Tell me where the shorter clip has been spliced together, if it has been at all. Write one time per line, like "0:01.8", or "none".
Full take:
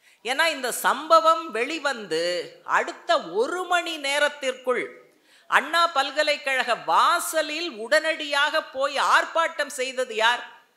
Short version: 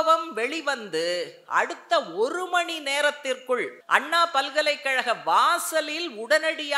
0:03.8